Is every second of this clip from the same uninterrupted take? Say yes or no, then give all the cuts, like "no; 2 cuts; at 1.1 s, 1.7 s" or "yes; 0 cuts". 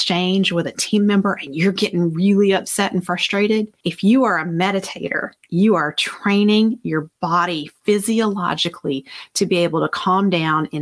yes; 0 cuts